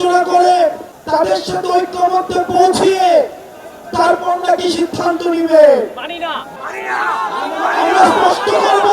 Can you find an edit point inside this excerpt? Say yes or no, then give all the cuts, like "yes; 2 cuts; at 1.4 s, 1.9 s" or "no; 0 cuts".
yes; 2 cuts; at 0.9 s, 6.5 s